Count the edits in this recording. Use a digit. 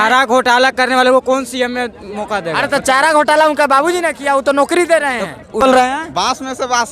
1